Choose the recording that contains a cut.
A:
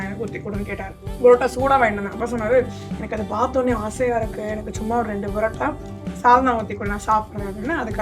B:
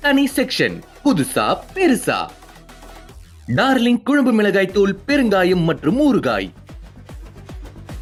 A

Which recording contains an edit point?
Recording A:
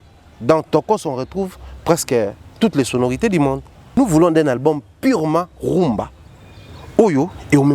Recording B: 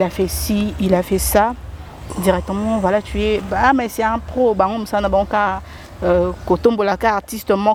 A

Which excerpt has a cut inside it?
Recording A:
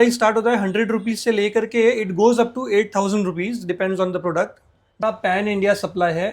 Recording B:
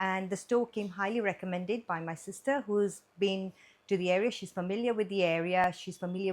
A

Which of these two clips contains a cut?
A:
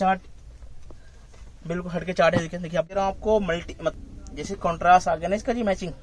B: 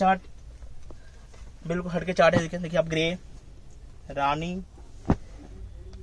A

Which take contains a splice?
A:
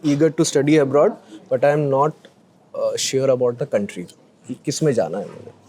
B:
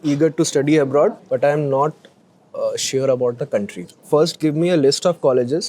B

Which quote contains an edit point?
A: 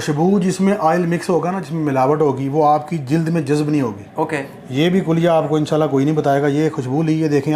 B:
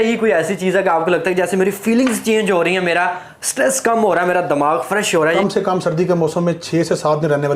B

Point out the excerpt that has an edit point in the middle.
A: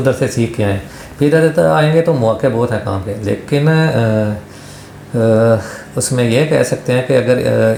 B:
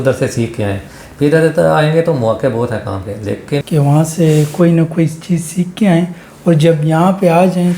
B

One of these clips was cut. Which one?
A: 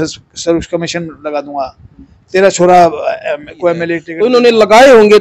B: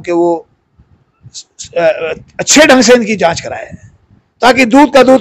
A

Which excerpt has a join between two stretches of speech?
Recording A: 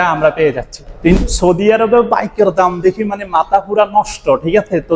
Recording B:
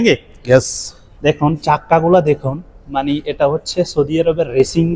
A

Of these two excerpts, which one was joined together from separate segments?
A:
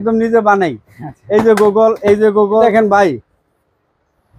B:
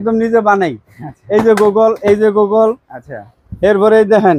A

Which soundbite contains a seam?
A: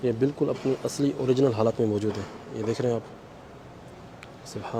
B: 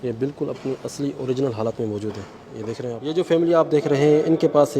B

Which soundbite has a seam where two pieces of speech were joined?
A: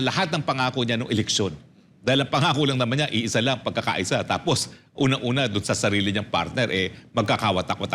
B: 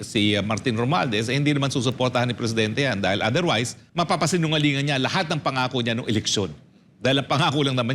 B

